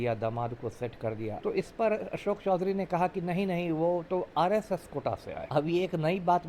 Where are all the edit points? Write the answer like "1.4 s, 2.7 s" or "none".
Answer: 1.4 s, 5.4 s